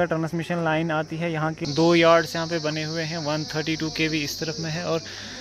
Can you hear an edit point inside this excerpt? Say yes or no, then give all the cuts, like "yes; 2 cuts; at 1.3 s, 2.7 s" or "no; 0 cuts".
yes; 1 cut; at 1.6 s